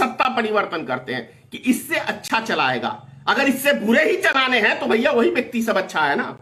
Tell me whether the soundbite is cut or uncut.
uncut